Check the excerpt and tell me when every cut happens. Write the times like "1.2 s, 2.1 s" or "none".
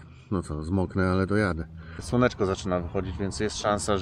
2.0 s